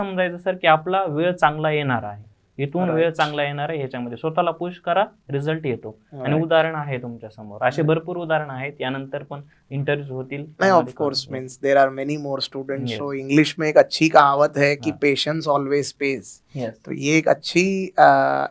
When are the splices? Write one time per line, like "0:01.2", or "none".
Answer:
none